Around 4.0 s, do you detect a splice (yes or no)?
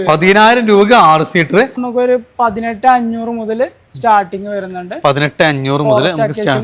no